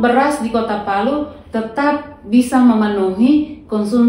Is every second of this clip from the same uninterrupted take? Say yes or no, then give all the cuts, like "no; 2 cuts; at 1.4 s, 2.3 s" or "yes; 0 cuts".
yes; 0 cuts